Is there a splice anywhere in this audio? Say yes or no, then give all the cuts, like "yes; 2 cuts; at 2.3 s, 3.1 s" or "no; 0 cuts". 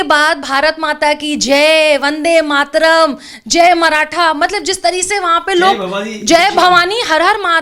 no; 0 cuts